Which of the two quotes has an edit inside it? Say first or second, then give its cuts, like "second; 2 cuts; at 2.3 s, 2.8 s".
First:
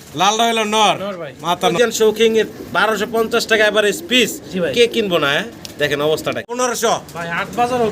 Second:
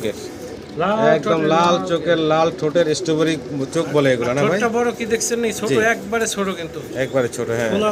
first; 2 cuts; at 1.7 s, 6.6 s